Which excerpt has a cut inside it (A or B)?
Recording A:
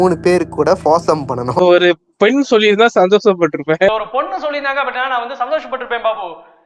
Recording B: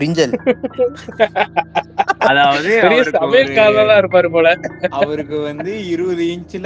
A